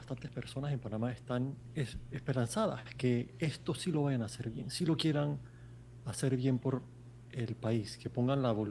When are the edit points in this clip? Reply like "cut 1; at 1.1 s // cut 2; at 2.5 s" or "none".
cut 1; at 1.6 s